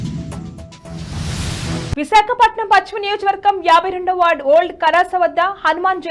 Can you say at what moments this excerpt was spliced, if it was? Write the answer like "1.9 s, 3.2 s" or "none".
1.9 s